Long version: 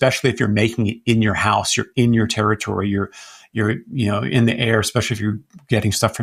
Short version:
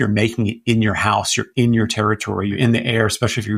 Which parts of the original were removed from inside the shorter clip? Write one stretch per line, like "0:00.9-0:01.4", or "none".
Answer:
0:02.9-0:04.3